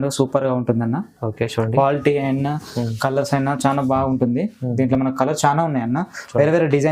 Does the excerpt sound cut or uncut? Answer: uncut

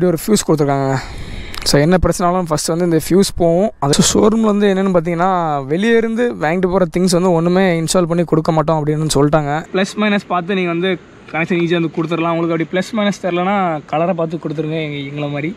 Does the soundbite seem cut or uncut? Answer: cut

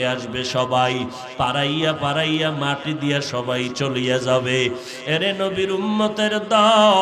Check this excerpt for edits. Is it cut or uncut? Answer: uncut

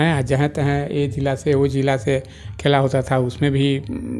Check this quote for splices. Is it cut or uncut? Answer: uncut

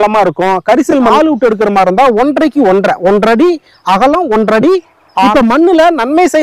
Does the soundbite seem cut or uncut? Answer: cut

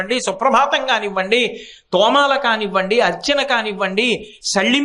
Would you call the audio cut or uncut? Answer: uncut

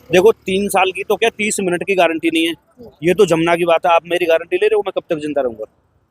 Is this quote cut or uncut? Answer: uncut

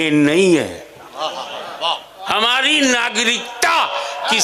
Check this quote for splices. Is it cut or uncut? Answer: uncut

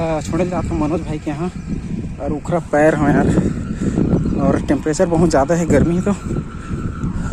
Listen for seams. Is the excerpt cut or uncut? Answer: uncut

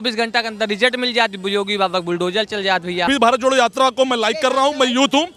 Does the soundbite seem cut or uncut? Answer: cut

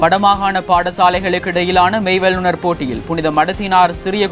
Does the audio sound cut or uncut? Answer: uncut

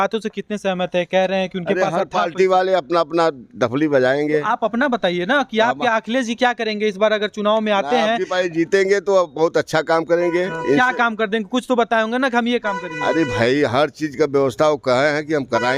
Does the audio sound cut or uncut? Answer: uncut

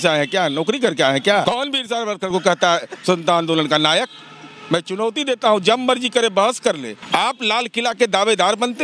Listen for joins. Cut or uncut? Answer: cut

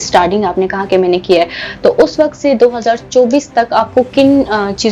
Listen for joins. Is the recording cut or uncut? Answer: uncut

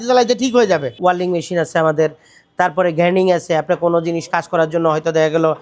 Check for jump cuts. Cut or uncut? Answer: cut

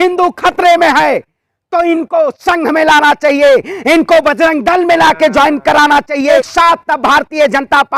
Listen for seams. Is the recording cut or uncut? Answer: cut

